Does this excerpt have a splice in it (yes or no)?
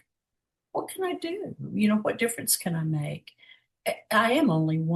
yes